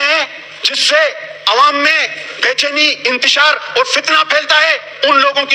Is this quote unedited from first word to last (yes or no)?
yes